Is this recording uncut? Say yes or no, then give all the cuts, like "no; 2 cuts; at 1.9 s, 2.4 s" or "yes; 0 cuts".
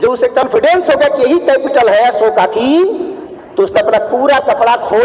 yes; 0 cuts